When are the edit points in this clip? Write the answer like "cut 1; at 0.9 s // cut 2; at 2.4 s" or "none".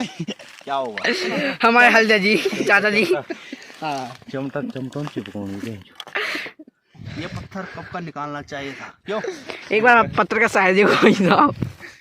cut 1; at 1.3 s // cut 2; at 7.1 s